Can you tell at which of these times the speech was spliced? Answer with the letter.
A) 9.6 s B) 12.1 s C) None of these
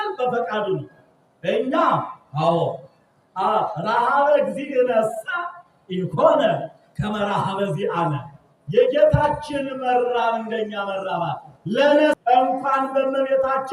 B